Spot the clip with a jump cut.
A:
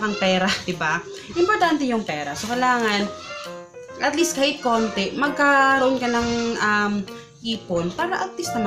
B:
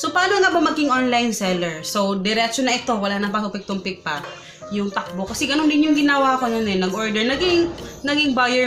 B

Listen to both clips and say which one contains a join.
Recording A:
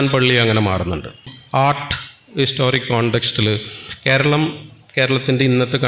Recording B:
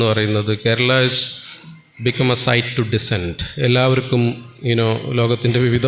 A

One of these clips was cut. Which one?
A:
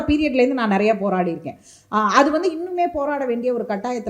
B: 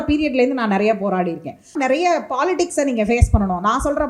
B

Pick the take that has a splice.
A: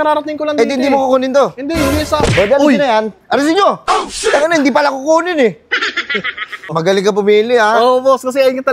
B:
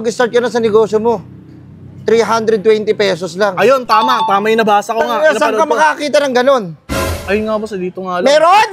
A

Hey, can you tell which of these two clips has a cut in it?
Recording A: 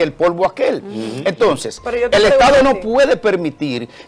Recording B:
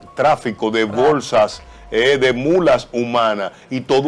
A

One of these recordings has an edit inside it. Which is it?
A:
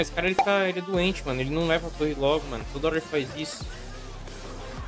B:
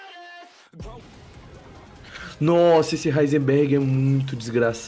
B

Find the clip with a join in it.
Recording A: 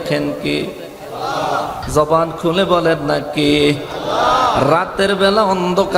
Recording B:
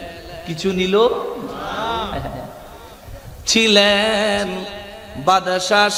A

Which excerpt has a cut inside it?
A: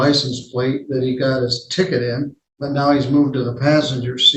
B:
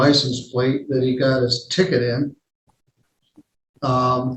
A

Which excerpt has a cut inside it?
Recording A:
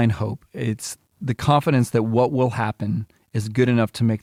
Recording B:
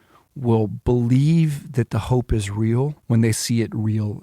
B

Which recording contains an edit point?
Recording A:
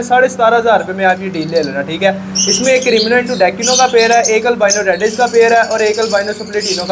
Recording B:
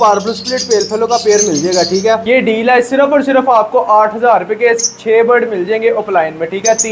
B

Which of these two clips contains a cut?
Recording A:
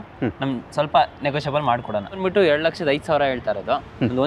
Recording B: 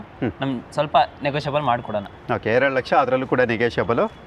A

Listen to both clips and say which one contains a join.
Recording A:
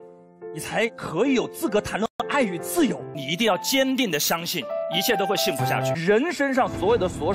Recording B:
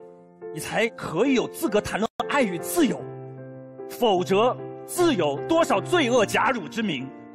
A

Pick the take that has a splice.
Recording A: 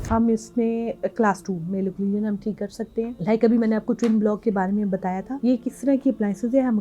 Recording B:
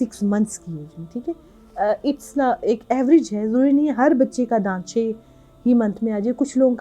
A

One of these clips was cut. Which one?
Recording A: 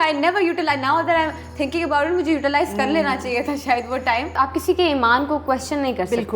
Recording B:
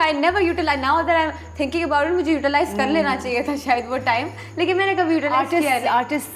A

